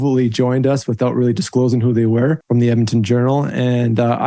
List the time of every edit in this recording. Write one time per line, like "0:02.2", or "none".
0:02.4

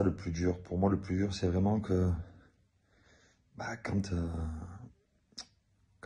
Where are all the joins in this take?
none

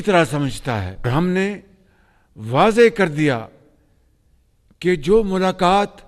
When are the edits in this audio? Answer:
0:01.1

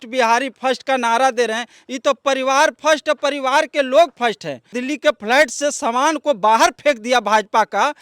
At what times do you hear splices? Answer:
0:04.8

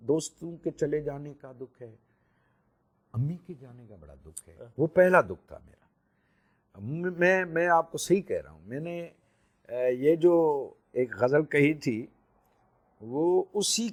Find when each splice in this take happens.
none

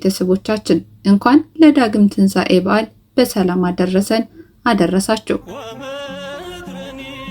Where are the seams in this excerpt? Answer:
0:05.5

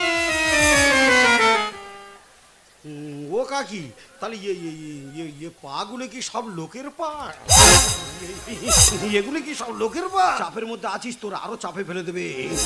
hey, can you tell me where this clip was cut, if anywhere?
0:10.4

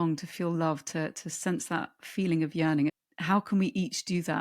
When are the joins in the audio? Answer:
0:03.0

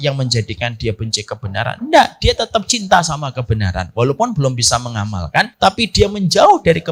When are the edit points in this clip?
0:05.5

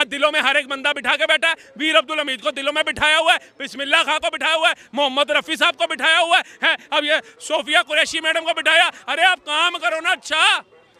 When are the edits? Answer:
none

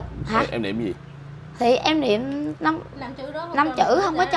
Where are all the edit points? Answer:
none

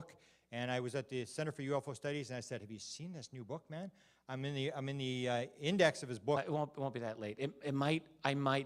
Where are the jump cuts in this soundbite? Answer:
none

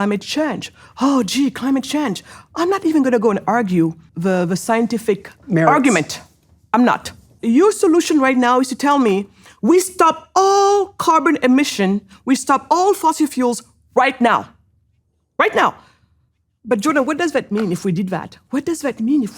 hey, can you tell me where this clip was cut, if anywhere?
0:04.1
0:05.4
0:07.4

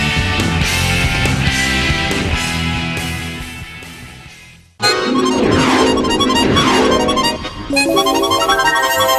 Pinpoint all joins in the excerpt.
0:04.6

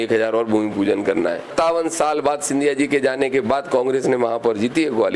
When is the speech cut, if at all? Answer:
0:01.5

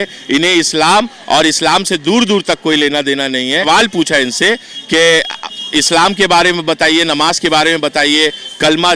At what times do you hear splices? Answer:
0:03.6

